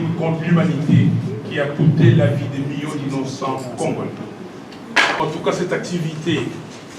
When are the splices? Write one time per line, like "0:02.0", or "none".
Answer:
0:05.2